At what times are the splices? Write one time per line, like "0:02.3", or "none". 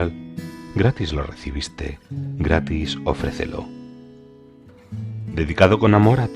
0:03.6
0:05.3